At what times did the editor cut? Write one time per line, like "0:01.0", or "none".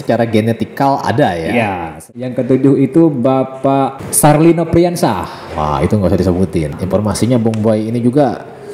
0:02.0
0:04.0
0:06.8

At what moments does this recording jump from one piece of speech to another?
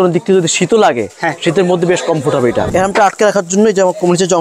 0:02.7

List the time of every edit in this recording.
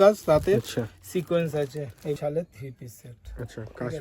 0:02.2

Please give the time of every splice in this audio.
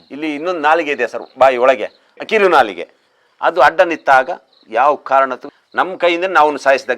0:05.5

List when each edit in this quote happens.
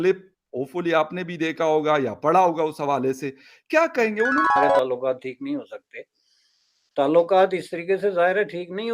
0:04.5

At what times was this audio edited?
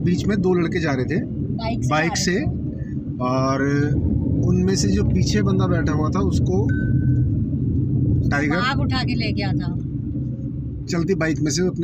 none

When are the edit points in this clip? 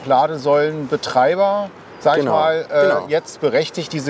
none

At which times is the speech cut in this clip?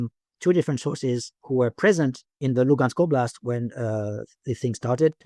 0:02.4

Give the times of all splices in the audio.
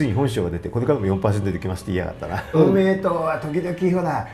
0:02.6

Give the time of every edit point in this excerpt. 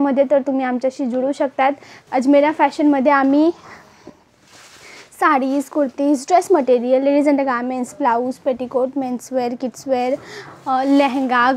0:01.9

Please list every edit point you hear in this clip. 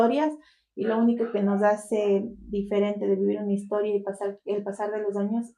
none

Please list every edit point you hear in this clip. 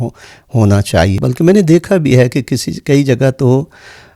0:01.2

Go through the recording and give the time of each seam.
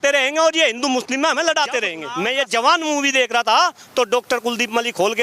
0:02.0

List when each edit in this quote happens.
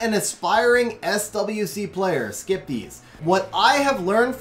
0:03.1

